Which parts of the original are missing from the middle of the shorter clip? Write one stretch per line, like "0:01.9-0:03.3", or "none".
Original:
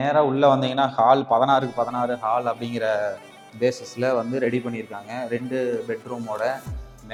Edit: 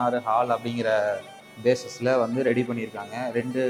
none